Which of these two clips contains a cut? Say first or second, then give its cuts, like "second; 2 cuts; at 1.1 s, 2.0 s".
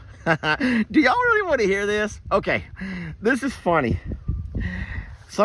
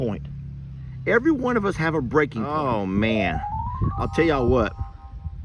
second; 1 cut; at 2.5 s